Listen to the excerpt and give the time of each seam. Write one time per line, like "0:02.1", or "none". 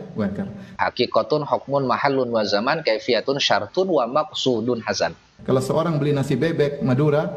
0:00.8
0:05.3